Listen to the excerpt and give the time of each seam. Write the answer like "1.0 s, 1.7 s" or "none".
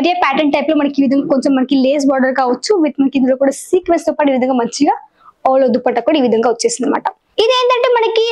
7.2 s